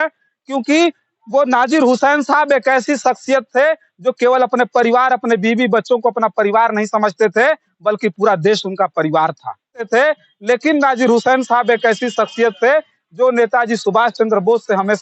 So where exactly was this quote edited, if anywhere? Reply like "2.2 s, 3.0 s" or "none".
9.9 s